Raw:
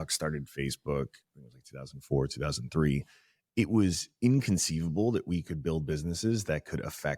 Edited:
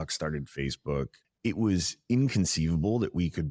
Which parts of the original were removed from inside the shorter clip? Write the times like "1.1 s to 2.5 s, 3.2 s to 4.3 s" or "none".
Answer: 1.2 s to 3.4 s